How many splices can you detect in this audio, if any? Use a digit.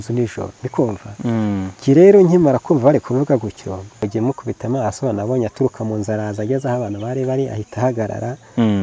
1